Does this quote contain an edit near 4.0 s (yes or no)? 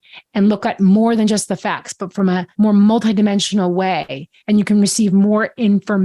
no